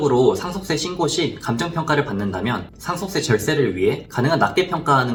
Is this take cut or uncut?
uncut